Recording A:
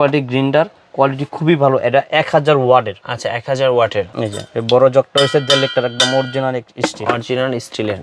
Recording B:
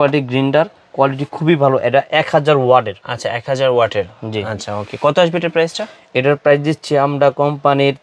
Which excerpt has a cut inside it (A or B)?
A